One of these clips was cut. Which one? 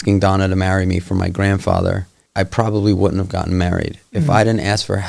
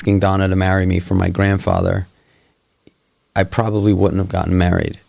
first; 1 cut; at 2.2 s

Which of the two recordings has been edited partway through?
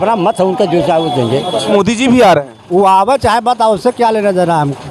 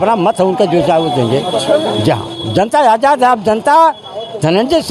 first; 1 cut; at 1.7 s

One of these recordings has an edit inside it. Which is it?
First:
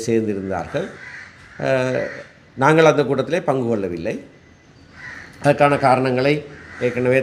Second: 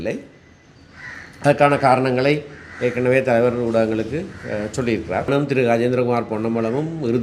second; 1 cut; at 5.3 s

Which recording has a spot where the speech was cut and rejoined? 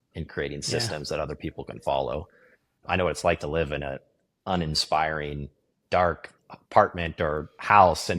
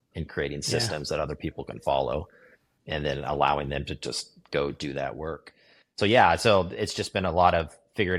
first; 1 cut; at 2.8 s

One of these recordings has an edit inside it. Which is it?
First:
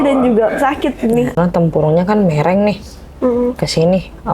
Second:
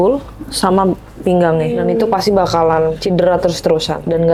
first; 1 cut; at 1.3 s

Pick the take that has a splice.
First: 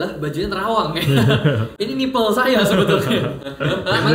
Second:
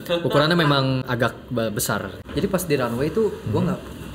second; 1 cut; at 2.1 s

